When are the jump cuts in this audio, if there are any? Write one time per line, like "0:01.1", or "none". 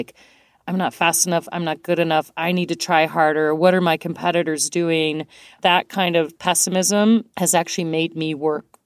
0:05.5
0:06.4
0:07.3